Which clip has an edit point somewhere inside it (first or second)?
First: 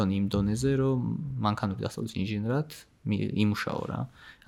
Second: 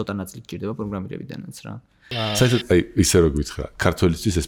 second